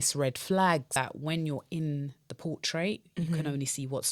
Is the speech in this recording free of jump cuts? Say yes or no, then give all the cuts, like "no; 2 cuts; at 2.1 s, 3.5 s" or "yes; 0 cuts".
no; 1 cut; at 1.0 s